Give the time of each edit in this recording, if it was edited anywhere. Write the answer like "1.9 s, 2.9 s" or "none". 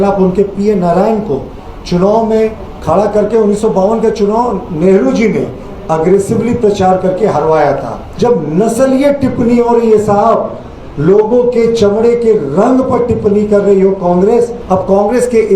8.0 s, 14.6 s